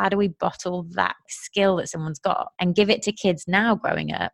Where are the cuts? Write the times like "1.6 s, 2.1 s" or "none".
1.3 s, 2.5 s

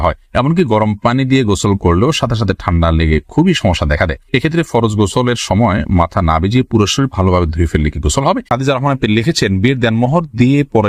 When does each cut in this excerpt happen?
8.4 s

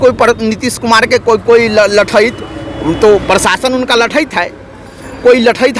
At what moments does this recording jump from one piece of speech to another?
none

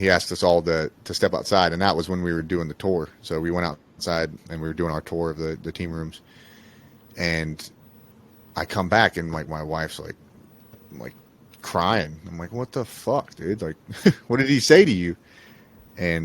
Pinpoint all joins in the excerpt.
4.5 s

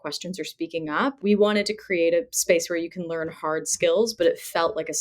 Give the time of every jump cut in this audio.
1.2 s

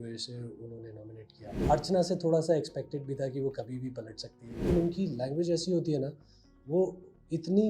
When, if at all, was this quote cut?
1.6 s, 4.7 s

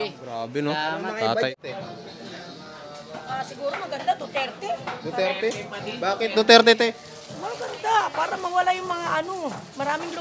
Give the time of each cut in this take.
1.5 s

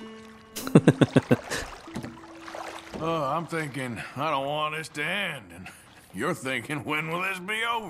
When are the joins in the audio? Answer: none

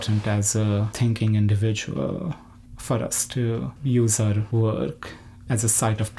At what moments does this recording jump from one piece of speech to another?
0.9 s, 4.4 s

